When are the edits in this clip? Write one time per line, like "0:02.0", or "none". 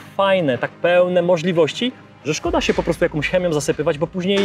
none